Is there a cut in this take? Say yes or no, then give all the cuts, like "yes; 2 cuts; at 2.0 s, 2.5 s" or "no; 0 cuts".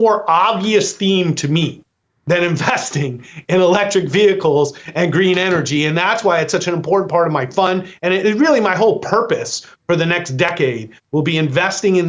no; 0 cuts